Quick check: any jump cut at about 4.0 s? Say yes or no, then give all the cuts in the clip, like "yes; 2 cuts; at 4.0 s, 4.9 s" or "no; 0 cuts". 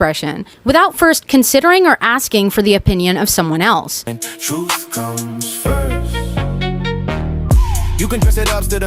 yes; 2 cuts; at 4.0 s, 7.4 s